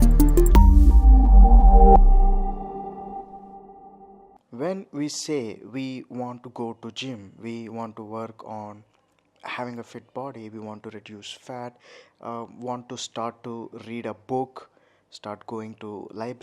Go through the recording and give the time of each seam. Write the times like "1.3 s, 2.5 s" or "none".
3.2 s